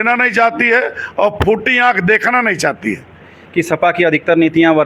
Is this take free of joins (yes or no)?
no